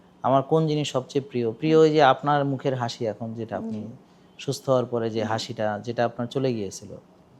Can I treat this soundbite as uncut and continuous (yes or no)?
yes